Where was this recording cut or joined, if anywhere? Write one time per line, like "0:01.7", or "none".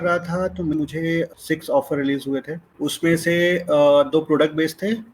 0:01.0
0:02.6